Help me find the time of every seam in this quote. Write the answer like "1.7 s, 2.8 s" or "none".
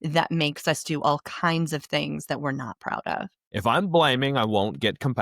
3.4 s